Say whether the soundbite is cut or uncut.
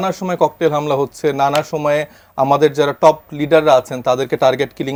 uncut